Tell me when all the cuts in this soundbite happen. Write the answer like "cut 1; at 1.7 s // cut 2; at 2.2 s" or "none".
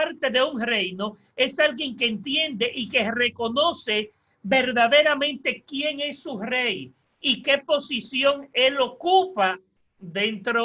none